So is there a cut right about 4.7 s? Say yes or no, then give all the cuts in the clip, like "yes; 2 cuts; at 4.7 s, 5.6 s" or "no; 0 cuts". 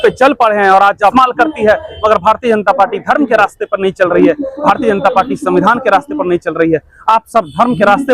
no; 1 cut; at 1.1 s